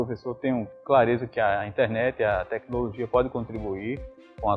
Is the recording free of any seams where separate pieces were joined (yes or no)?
yes